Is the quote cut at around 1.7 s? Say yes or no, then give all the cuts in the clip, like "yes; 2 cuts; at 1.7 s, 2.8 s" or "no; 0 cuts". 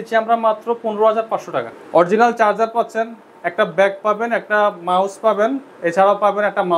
yes; 1 cut; at 1.7 s